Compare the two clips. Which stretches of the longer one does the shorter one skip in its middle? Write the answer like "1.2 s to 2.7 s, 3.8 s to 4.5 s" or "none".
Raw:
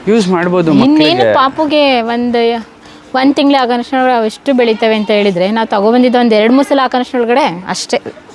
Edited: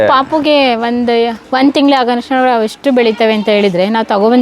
2.7 s to 3.0 s